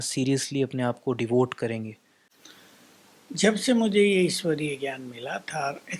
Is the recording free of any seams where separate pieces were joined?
yes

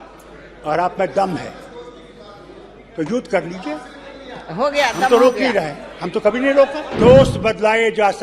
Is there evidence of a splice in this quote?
yes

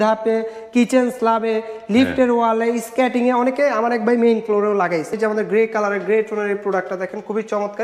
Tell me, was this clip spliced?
yes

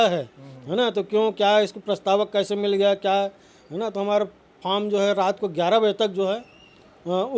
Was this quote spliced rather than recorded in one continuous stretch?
no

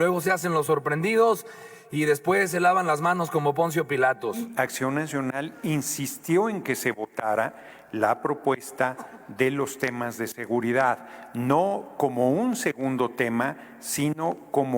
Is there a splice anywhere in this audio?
yes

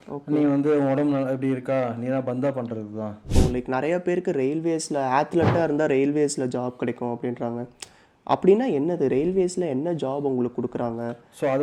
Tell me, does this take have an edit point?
yes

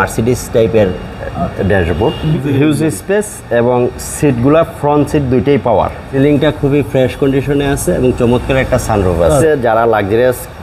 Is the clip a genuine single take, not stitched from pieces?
no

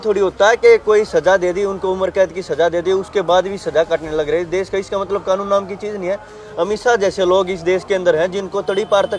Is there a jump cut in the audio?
no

